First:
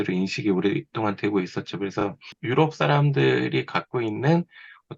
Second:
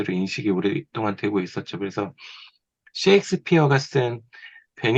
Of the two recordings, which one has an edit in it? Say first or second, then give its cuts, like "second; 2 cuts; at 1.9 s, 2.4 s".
first; 1 cut; at 2.4 s